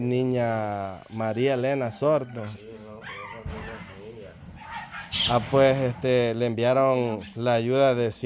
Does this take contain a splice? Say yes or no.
no